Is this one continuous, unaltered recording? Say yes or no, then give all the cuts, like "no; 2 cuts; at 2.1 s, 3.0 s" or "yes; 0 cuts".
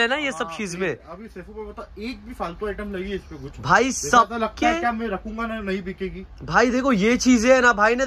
yes; 0 cuts